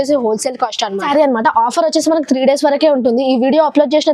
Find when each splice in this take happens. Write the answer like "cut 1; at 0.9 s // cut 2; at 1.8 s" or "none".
cut 1; at 1.0 s